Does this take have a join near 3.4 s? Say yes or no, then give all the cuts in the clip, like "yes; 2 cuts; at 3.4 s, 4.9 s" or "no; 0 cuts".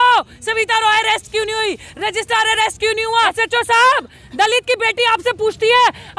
yes; 1 cut; at 3.4 s